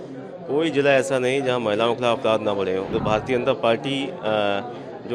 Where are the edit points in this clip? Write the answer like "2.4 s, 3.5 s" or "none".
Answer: 3.0 s